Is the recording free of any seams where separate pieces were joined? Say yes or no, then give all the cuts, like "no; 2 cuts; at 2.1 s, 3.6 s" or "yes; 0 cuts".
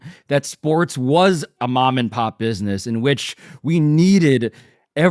yes; 0 cuts